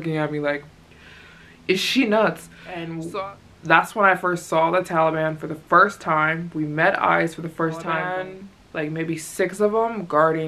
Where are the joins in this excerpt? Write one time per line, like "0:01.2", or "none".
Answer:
0:02.9
0:08.0